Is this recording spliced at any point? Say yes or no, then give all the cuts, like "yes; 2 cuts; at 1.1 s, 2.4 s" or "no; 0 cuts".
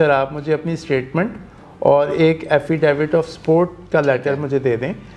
no; 0 cuts